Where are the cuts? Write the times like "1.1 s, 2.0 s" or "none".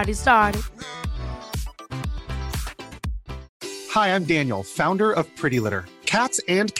3.5 s